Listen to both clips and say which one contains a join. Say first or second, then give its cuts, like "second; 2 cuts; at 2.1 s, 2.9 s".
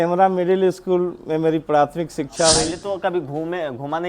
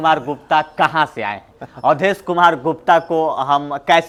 first; 1 cut; at 2.8 s